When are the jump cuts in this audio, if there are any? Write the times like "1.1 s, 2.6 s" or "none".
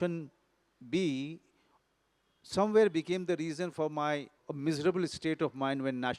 4.4 s